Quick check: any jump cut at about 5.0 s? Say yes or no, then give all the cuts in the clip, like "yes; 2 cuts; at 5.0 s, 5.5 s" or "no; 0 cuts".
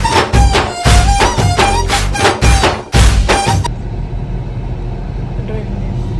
no; 1 cut; at 3.6 s